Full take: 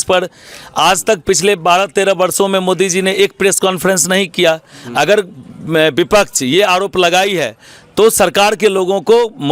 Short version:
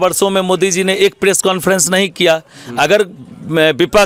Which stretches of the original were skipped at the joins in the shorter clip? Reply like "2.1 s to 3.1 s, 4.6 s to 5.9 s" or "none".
none